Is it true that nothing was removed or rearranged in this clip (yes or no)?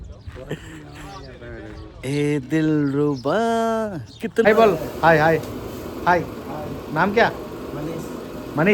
no